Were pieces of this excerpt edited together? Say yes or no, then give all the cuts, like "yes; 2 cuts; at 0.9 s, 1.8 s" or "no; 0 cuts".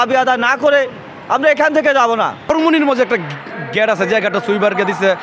yes; 1 cut; at 2.5 s